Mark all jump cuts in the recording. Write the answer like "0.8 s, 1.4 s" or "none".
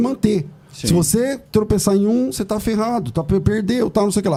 none